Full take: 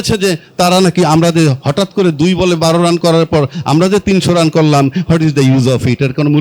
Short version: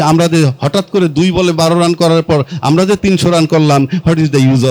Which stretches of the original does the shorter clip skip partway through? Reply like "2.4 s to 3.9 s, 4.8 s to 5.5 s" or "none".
none